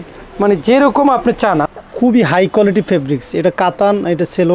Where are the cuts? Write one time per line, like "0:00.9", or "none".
0:01.6